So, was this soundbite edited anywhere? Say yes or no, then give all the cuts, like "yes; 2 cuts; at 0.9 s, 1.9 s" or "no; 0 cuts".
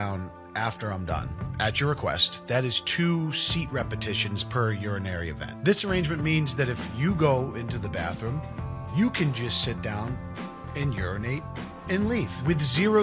no; 0 cuts